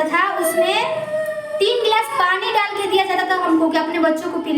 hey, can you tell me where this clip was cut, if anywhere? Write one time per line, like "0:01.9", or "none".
none